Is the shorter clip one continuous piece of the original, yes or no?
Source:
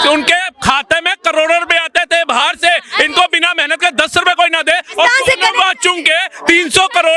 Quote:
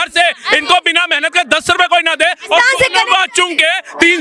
yes